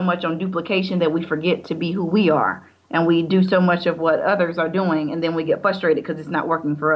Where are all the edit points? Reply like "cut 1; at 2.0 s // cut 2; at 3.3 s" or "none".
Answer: none